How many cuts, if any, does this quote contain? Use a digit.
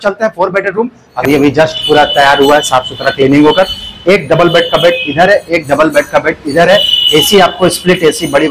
1